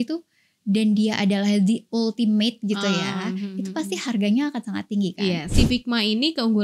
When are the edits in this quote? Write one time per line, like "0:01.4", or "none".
0:05.5